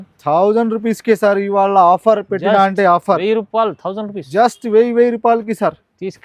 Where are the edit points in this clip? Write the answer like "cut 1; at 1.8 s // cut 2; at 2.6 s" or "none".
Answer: none